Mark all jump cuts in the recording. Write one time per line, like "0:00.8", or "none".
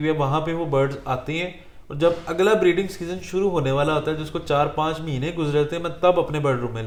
none